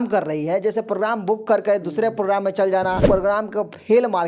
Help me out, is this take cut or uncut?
cut